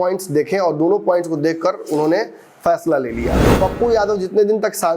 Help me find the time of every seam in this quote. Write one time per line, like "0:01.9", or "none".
0:03.5